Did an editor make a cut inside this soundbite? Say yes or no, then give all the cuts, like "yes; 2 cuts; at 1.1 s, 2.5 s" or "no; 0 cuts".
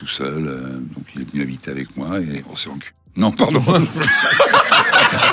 yes; 1 cut; at 2.5 s